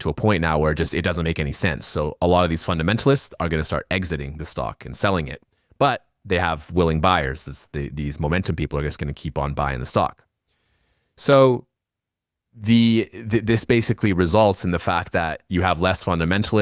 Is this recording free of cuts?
yes; 0 cuts

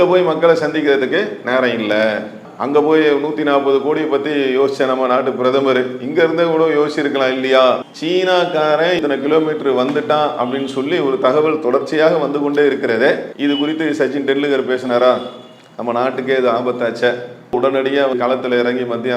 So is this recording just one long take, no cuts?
no; 4 cuts; at 7.9 s, 9.0 s, 13.3 s, 18.1 s

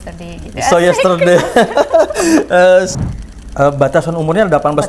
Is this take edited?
yes; 1 cut; at 2.9 s

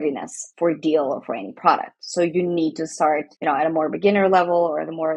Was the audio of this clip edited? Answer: no; 0 cuts

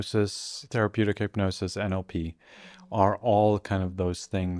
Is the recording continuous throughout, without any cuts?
yes; 0 cuts

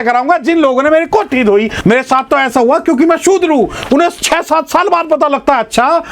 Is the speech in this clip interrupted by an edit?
yes; 1 cut; at 1.7 s

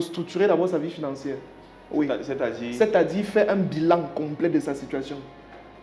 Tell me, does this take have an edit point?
no; 0 cuts

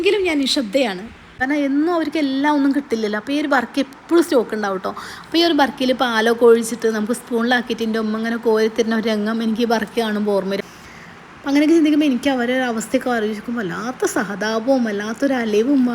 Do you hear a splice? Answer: yes; 2 cuts; at 1.3 s, 10.6 s

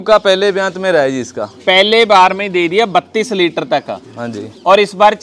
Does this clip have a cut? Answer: no; 0 cuts

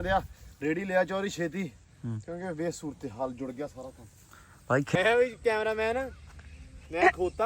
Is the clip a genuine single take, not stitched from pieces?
no; 1 cut; at 5.0 s

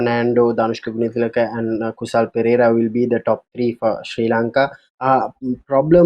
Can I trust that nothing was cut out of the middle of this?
yes; 0 cuts

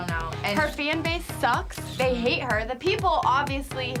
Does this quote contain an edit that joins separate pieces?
no; 0 cuts

